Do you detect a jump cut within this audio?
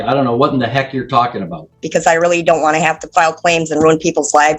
yes; 1 cut; at 1.8 s

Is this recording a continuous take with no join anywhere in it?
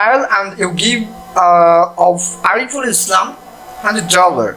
yes; 0 cuts

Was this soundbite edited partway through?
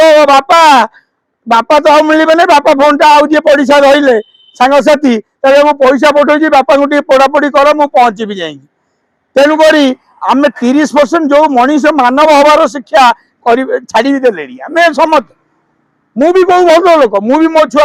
no; 0 cuts

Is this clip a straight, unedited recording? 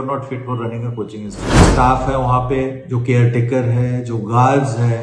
no; 1 cut; at 1.7 s

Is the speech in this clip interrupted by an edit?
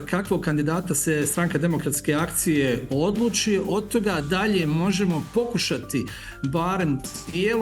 no; 0 cuts

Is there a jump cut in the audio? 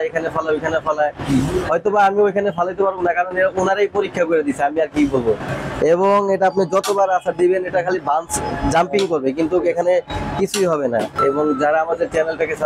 yes; 2 cuts; at 5.5 s, 11.1 s

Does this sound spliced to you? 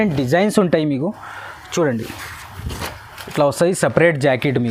no; 0 cuts

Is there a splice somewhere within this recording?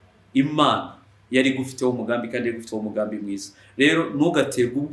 no; 0 cuts

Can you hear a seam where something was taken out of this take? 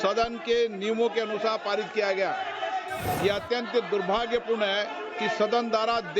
yes; 1 cut; at 3.1 s

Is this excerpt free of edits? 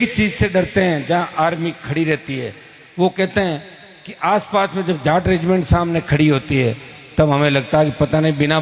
yes; 0 cuts

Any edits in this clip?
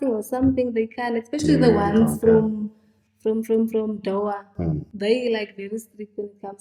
no; 0 cuts

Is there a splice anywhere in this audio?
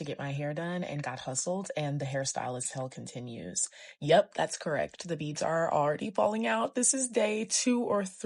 no; 0 cuts

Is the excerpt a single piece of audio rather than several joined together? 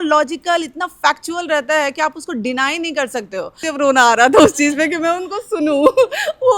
no; 1 cut; at 3.6 s

